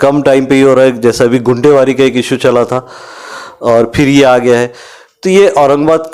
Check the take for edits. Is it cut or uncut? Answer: uncut